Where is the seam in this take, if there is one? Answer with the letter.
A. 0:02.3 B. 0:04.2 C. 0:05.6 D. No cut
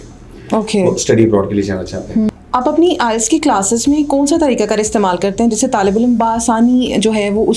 A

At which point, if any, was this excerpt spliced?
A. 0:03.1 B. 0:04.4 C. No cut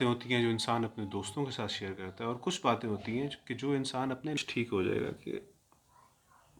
B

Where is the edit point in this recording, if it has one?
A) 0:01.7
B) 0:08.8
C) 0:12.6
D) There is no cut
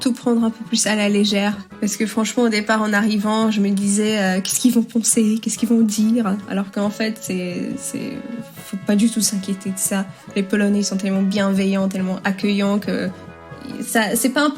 A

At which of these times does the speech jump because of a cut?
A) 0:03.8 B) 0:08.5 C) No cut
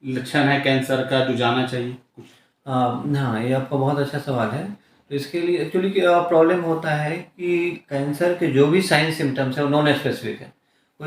C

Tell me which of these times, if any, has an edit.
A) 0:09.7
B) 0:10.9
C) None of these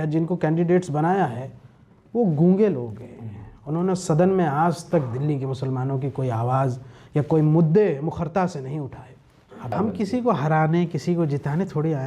A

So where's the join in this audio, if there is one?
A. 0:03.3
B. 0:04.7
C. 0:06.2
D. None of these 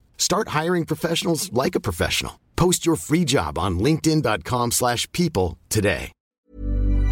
C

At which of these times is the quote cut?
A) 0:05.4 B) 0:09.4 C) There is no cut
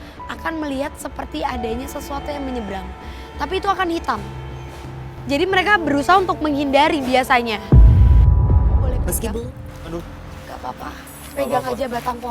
B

